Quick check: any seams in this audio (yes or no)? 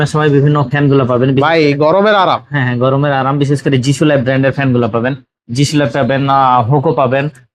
no